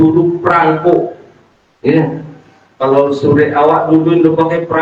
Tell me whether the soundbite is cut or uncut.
uncut